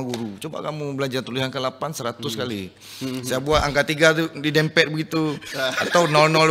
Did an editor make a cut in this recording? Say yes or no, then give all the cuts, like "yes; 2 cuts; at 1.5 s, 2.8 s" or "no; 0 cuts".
no; 0 cuts